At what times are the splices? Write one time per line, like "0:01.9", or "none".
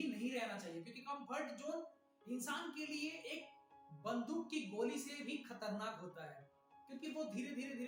none